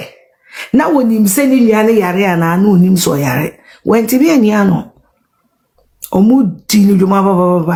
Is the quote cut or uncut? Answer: uncut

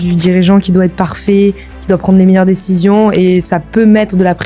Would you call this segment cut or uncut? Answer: uncut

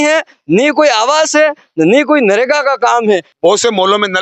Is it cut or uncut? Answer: cut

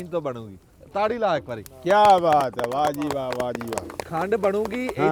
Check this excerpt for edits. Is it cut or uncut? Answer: uncut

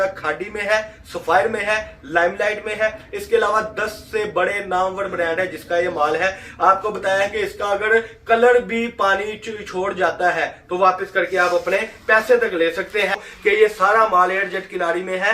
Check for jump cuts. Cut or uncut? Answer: cut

